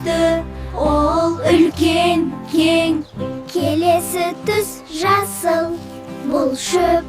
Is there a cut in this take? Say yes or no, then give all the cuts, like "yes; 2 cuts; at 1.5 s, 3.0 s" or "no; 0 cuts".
yes; 1 cut; at 3.0 s